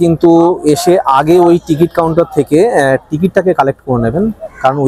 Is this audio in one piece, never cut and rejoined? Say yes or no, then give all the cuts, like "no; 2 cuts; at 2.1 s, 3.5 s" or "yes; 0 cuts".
yes; 0 cuts